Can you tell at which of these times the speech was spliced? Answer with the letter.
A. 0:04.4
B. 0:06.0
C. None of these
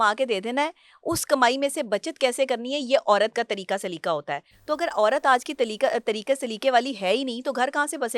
C